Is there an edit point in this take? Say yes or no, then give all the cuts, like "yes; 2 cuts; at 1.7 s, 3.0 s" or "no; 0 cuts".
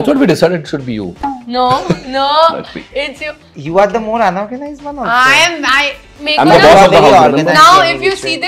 no; 0 cuts